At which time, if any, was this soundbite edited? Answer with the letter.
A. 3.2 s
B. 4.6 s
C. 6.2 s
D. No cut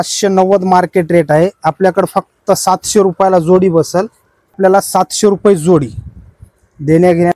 B